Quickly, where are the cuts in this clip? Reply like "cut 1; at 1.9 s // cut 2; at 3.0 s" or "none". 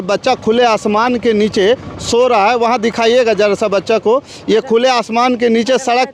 none